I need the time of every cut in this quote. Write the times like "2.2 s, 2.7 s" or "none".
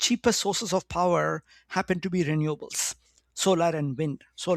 none